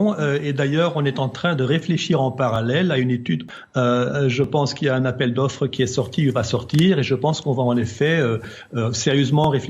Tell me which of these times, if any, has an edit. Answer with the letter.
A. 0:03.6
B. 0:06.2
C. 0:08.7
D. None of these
A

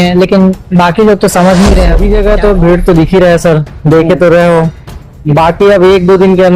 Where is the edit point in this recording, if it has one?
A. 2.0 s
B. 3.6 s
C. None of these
A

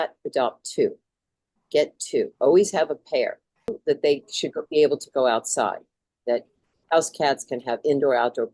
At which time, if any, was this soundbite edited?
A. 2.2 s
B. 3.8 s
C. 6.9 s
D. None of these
B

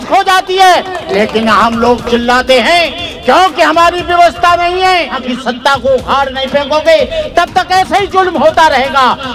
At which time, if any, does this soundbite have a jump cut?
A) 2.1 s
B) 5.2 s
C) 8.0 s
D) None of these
B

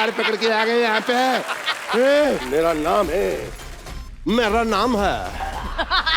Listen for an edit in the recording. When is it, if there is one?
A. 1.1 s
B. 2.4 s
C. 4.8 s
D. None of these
B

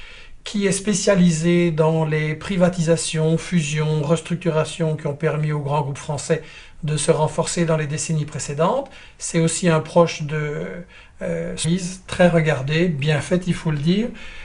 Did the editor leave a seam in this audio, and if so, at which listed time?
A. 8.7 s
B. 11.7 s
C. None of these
C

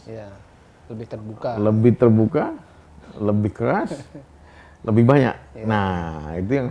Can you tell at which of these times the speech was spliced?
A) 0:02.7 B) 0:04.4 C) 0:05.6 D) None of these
D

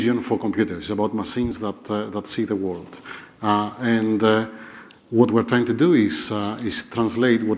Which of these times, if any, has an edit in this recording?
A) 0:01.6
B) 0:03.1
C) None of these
A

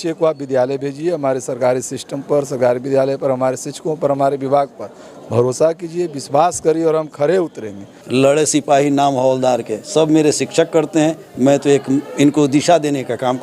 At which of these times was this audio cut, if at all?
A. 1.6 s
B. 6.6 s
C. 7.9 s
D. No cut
C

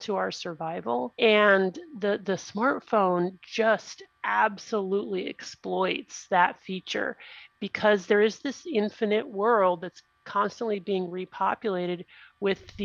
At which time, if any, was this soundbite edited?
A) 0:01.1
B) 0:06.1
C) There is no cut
A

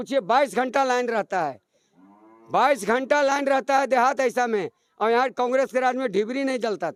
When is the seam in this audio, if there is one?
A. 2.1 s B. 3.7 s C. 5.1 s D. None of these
D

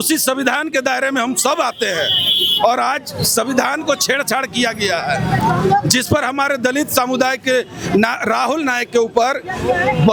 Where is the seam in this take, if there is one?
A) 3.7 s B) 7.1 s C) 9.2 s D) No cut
D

